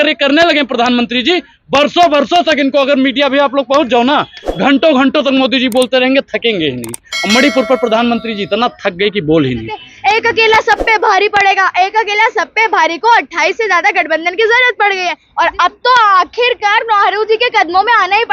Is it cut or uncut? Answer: cut